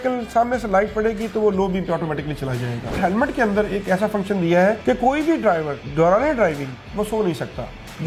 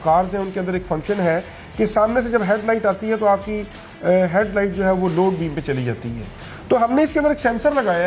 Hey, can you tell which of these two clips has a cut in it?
first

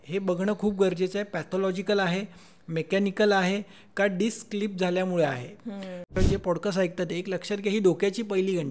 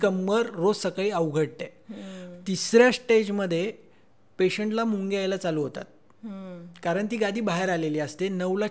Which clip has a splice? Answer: first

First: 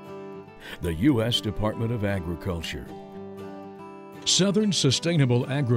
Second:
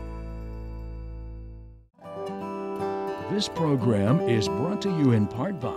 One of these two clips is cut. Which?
second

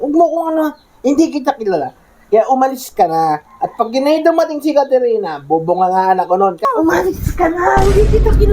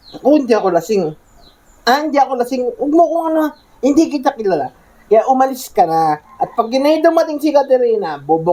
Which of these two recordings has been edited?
first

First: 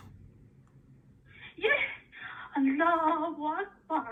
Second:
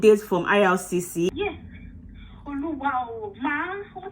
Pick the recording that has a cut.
second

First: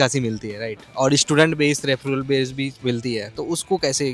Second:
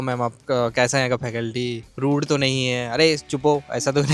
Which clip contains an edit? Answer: second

